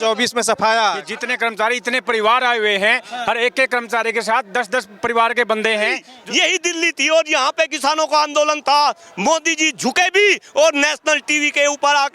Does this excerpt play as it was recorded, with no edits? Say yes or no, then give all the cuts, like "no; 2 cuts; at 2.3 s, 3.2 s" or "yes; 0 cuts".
no; 2 cuts; at 1.2 s, 6.1 s